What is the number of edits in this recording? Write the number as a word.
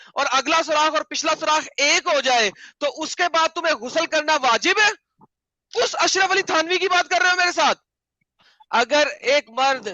one